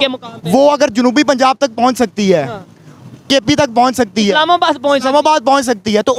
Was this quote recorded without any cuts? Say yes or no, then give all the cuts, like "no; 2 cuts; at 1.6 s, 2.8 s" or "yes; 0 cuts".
yes; 0 cuts